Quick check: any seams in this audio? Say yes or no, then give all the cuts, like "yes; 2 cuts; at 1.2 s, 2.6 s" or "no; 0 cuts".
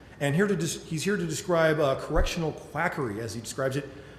yes; 1 cut; at 1.4 s